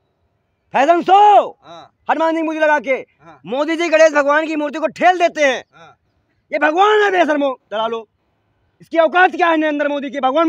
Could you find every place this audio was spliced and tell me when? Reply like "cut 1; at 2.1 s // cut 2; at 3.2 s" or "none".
none